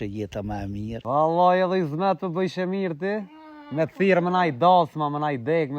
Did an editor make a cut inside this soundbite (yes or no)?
yes